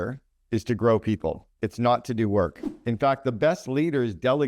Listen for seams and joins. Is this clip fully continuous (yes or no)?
no